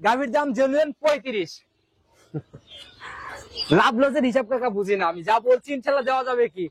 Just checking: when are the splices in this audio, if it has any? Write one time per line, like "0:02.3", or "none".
none